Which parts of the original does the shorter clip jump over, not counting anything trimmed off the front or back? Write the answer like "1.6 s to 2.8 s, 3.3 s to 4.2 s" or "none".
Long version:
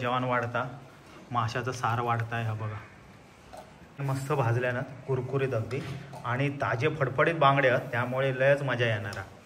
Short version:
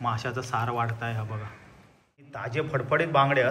3.7 s to 6.7 s